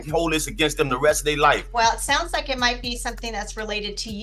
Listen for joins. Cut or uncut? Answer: cut